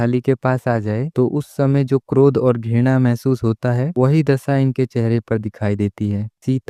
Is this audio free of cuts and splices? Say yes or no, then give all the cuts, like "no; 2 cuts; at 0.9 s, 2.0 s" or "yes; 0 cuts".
yes; 0 cuts